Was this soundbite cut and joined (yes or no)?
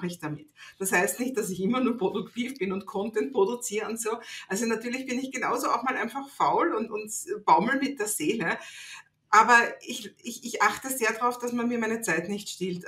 no